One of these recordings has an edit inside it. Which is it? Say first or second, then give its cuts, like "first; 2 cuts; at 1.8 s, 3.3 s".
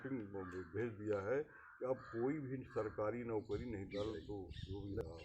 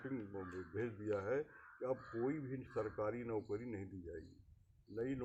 first; 1 cut; at 3.9 s